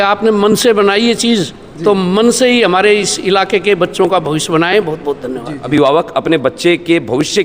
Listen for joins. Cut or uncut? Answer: cut